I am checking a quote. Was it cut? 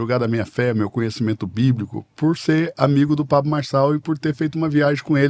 no; 0 cuts

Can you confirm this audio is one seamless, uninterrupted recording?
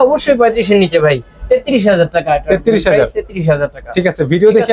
yes; 0 cuts

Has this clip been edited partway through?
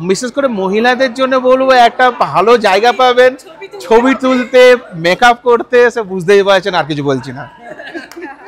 no; 0 cuts

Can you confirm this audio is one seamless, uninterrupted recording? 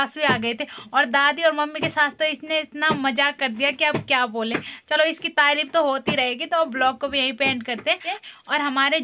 yes; 0 cuts

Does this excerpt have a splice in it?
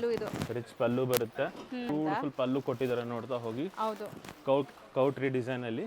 yes; 1 cut; at 1.9 s

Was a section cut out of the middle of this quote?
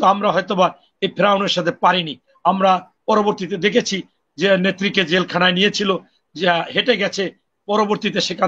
no; 0 cuts

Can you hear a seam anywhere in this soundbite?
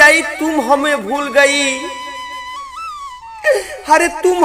yes; 2 cuts; at 2.0 s, 3.3 s

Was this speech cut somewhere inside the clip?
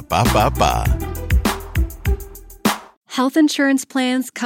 yes; 1 cut; at 3.0 s

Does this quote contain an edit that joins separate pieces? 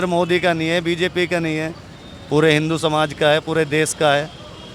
no; 0 cuts

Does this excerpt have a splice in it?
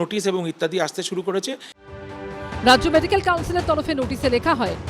no; 0 cuts

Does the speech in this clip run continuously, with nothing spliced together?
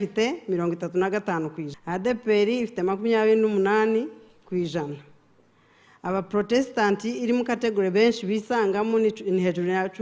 no; 1 cut; at 1.7 s

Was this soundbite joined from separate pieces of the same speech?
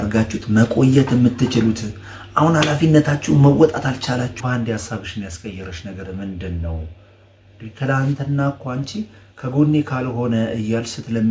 yes; 1 cut; at 4.3 s

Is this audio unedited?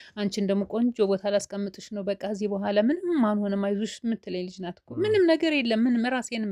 yes; 0 cuts

